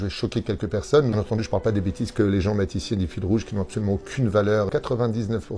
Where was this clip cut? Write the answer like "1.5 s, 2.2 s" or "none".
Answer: 1.1 s, 4.7 s